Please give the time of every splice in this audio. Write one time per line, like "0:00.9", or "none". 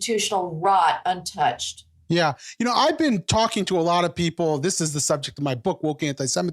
none